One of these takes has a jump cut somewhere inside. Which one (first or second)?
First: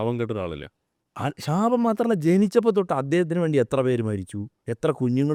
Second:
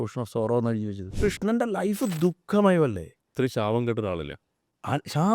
second